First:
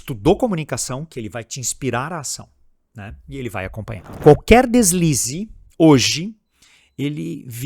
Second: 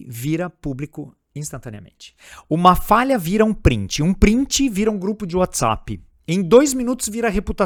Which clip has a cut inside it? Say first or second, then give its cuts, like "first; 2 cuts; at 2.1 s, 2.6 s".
first; 1 cut; at 4.1 s